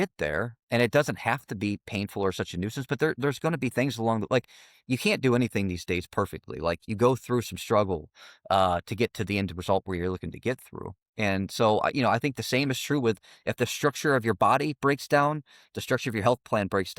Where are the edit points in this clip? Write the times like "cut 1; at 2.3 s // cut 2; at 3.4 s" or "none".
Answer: cut 1; at 6.8 s